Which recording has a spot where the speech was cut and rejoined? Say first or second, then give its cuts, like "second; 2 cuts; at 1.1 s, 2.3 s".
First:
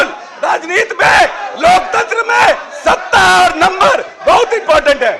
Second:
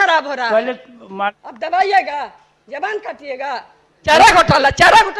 second; 2 cuts; at 1.4 s, 3.9 s